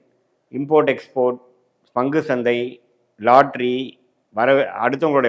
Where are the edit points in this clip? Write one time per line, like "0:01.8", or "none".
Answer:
none